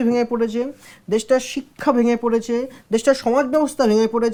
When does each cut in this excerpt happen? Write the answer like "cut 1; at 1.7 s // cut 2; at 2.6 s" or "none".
none